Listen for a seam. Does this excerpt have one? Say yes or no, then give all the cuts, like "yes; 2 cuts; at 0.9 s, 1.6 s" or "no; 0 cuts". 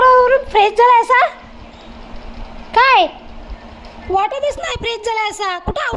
no; 0 cuts